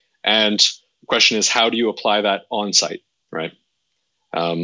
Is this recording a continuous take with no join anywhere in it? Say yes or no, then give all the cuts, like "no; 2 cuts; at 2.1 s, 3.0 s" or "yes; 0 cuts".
no; 1 cut; at 3.1 s